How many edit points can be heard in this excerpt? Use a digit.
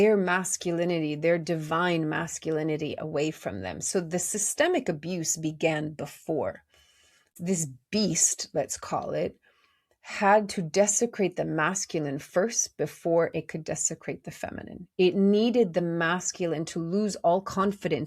1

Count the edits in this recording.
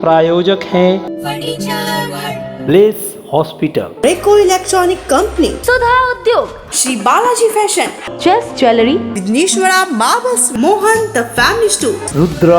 2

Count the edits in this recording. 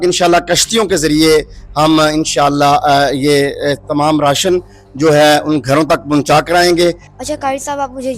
1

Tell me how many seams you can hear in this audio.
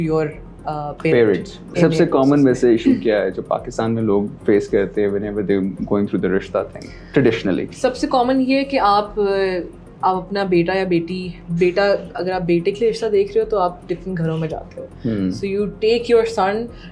1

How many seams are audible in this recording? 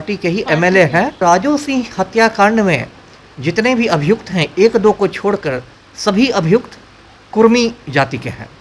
1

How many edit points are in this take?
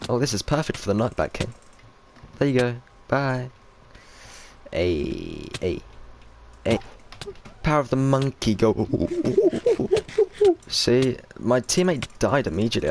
1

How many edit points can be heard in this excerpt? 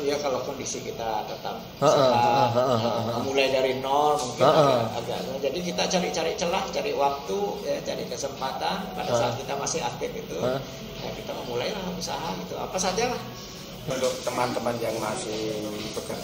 1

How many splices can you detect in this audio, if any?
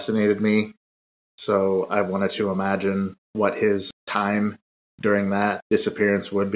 2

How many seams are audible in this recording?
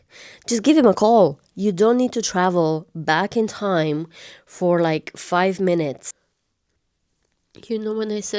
1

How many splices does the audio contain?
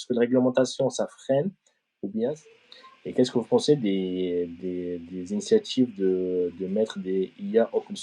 1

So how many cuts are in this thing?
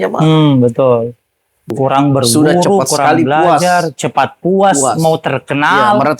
1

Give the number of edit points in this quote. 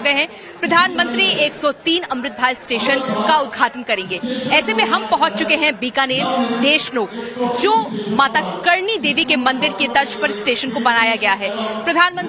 0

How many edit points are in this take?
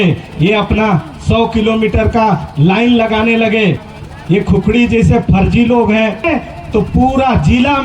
2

